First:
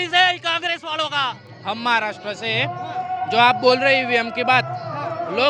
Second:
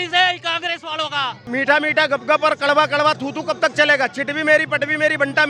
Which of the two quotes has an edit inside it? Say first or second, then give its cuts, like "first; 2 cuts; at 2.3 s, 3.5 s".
second; 1 cut; at 1.5 s